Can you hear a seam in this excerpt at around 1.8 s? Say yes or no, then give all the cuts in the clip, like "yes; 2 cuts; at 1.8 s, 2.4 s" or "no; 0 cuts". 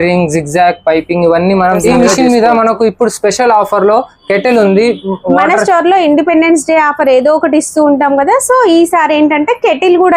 yes; 1 cut; at 1.8 s